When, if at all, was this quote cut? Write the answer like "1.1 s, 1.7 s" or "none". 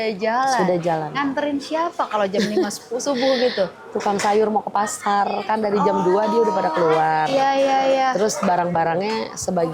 none